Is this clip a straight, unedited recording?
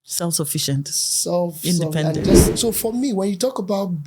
no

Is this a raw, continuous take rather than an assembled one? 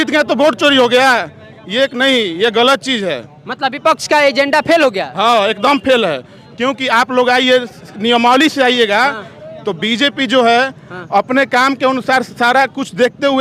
yes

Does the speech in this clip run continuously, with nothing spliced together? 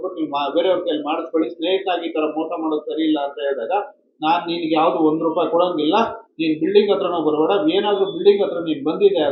yes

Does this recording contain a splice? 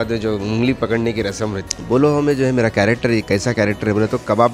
yes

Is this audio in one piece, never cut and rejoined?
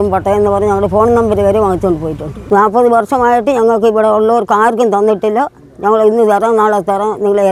yes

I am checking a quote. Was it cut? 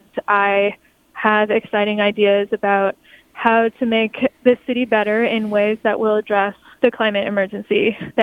yes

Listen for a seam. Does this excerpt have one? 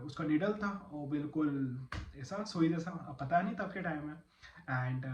no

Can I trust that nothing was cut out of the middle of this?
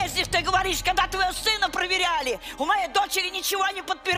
yes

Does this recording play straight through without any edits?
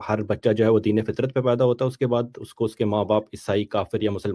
yes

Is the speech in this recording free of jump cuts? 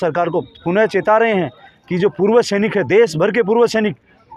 yes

